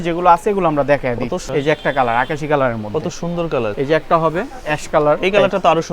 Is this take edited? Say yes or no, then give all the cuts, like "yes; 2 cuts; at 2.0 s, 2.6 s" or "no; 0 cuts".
yes; 2 cuts; at 1.4 s, 3.7 s